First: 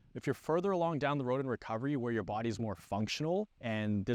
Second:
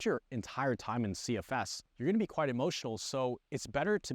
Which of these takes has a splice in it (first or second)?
second